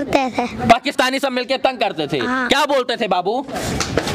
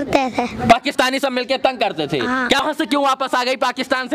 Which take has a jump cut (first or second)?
second